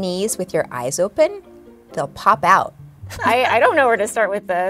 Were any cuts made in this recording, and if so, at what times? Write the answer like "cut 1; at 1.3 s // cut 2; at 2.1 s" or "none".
cut 1; at 3.0 s